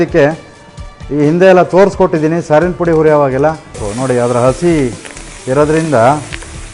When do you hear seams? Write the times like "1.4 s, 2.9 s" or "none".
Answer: 3.9 s